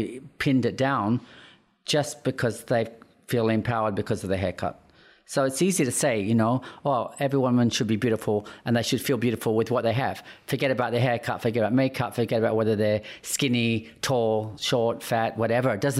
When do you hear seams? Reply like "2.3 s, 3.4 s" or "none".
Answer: none